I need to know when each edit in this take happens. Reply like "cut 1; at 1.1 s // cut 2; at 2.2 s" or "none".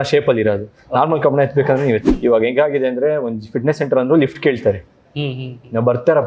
cut 1; at 2.0 s